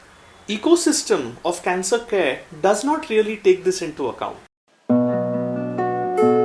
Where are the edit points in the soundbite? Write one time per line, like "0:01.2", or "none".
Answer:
0:04.7